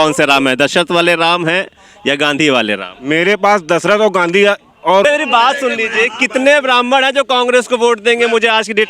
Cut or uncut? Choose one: cut